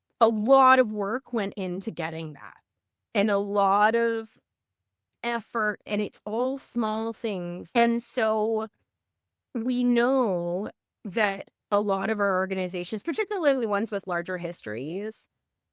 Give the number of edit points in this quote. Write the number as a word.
two